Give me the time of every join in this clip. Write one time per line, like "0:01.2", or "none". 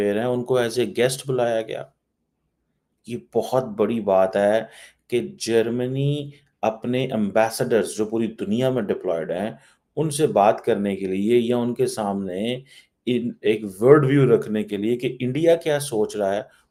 none